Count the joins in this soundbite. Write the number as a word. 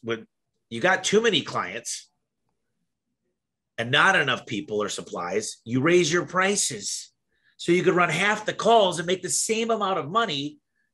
zero